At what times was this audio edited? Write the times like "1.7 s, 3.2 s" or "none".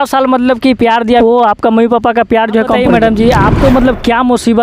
1.2 s, 2.8 s